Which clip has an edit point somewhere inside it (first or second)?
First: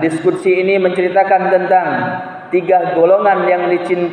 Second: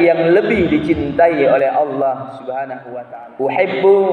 second